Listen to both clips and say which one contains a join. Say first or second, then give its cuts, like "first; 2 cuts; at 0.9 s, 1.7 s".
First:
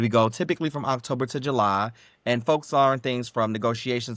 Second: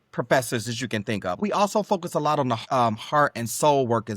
second; 2 cuts; at 1.4 s, 2.6 s